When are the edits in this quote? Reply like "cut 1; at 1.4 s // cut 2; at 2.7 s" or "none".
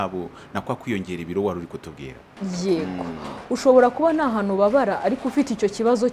cut 1; at 2.2 s